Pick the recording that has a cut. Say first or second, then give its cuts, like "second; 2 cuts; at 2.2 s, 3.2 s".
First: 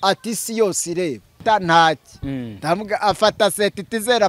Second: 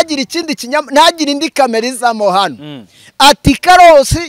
first; 1 cut; at 1.4 s